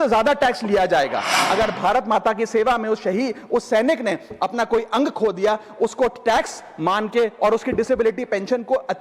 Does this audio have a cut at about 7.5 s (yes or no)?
no